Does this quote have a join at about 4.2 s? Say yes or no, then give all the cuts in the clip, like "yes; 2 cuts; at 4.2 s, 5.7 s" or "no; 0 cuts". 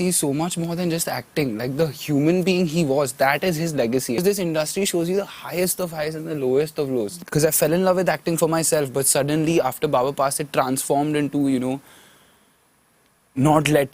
yes; 2 cuts; at 4.2 s, 7.2 s